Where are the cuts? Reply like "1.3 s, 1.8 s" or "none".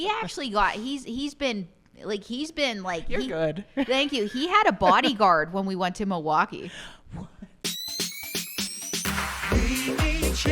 7.6 s